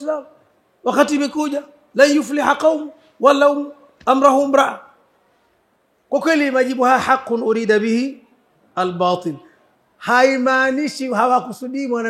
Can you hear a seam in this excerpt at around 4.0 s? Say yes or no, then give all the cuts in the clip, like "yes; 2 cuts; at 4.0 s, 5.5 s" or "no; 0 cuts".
no; 0 cuts